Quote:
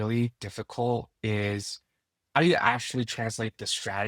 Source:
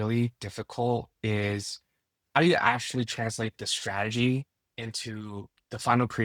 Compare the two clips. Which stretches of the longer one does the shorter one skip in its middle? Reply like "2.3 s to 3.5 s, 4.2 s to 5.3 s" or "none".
none